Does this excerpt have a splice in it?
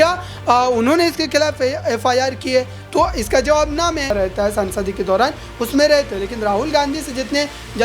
yes; 1 cut; at 4.1 s

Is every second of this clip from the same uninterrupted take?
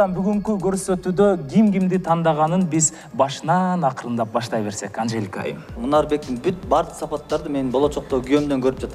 no; 1 cut; at 5.8 s

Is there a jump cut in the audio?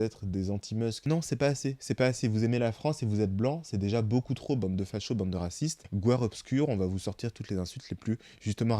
yes; 1 cut; at 1.0 s

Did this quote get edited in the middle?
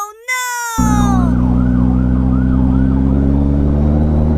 no; 0 cuts

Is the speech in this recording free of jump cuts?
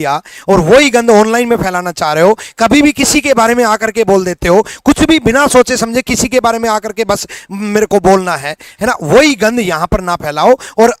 yes; 0 cuts

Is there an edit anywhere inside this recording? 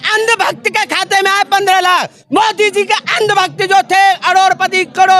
yes; 1 cut; at 2.2 s

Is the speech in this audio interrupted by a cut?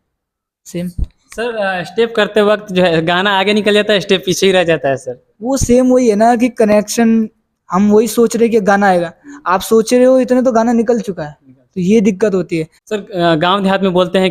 yes; 1 cut; at 12.8 s

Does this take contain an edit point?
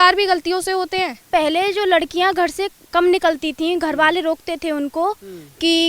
yes; 1 cut; at 1.3 s

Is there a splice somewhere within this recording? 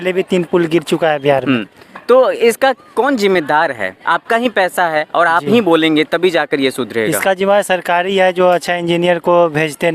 no; 0 cuts

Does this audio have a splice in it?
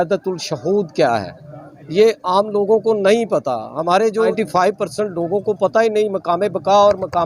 yes; 1 cut; at 4.3 s

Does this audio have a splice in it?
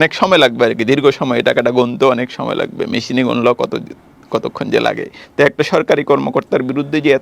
yes; 1 cut; at 5.2 s

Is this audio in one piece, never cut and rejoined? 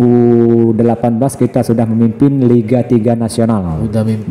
yes; 0 cuts

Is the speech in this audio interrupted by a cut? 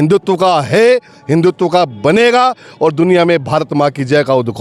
no; 0 cuts

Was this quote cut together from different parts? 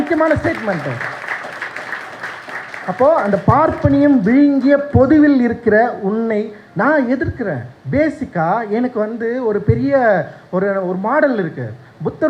yes; 1 cut; at 7.7 s

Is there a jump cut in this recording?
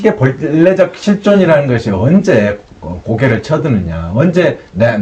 no; 0 cuts

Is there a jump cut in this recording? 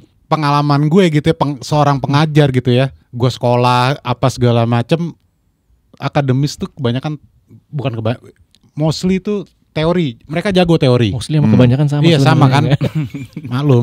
no; 0 cuts

